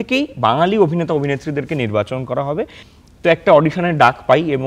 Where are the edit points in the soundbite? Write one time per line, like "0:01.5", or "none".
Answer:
0:02.8